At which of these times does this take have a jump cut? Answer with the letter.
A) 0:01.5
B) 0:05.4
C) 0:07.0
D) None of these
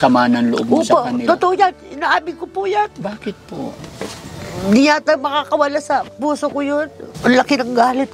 C